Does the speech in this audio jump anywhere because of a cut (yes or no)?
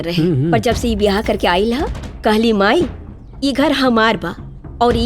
no